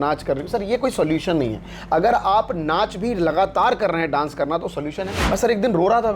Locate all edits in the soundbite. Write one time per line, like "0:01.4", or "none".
0:05.1